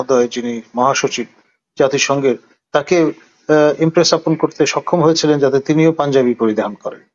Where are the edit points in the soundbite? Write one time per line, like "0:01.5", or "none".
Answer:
none